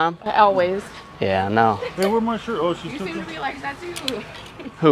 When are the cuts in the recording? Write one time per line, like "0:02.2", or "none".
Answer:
none